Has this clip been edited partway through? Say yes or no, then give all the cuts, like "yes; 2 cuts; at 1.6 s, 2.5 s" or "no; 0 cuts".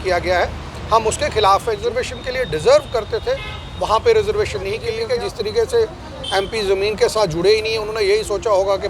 yes; 2 cuts; at 1.8 s, 4.9 s